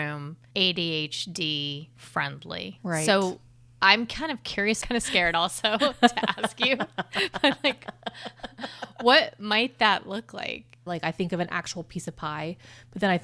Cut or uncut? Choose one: cut